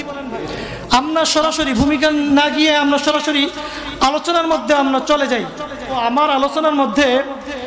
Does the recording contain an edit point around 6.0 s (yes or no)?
yes